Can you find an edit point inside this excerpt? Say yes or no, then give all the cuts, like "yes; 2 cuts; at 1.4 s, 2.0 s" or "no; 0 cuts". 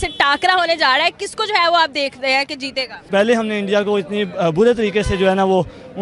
yes; 1 cut; at 3.0 s